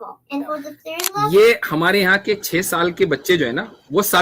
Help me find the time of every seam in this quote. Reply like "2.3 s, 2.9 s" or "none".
1.3 s